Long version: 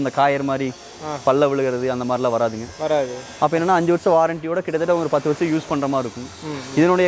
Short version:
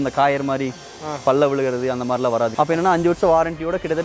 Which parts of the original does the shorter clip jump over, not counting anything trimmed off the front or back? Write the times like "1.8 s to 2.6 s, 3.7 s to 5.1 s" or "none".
2.5 s to 3.4 s